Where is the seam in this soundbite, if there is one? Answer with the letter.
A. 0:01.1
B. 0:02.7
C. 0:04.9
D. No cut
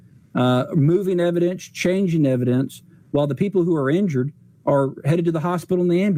D